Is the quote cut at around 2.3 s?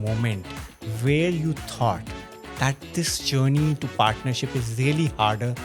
no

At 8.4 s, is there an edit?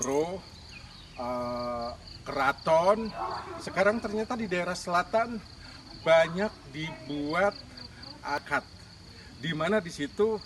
yes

